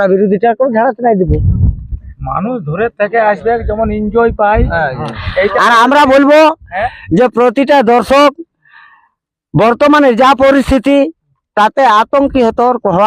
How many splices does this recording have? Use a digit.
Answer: 0